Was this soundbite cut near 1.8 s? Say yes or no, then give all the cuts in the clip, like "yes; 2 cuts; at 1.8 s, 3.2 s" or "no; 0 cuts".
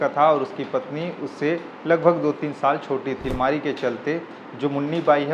no; 1 cut; at 3.3 s